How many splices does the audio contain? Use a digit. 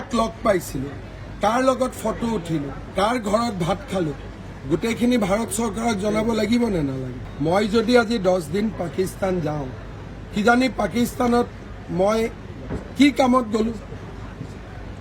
0